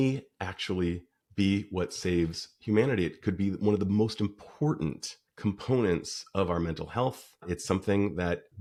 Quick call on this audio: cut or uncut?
uncut